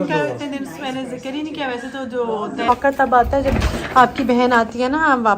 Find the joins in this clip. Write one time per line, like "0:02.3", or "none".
0:02.7